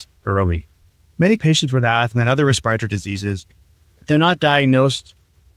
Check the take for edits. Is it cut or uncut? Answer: cut